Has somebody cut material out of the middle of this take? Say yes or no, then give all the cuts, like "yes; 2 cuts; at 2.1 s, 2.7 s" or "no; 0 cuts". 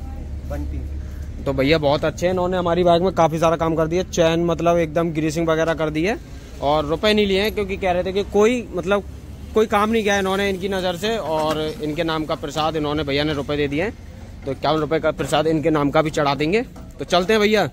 no; 0 cuts